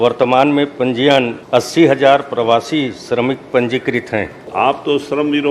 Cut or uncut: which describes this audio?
cut